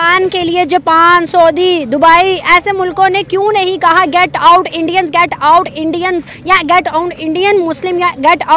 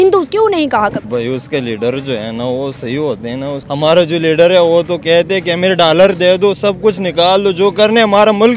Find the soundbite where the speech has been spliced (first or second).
second